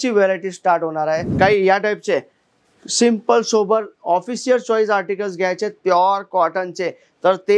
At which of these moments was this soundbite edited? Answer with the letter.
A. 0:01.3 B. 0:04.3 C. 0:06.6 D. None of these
A